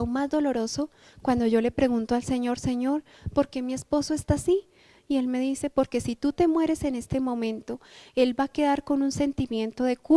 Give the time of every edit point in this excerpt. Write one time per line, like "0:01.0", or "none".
0:03.6